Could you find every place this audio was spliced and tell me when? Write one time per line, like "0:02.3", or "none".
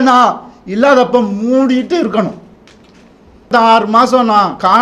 0:03.5